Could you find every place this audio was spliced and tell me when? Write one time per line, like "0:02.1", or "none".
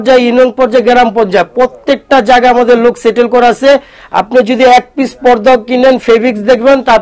none